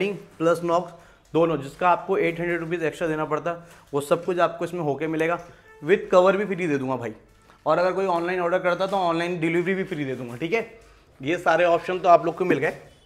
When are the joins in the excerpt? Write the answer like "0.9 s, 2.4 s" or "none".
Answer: none